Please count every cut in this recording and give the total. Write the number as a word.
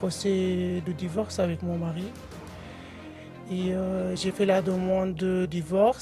zero